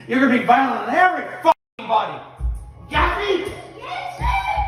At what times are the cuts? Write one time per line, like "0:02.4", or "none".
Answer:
none